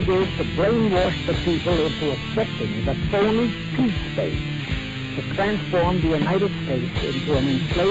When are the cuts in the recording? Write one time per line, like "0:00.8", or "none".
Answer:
0:03.7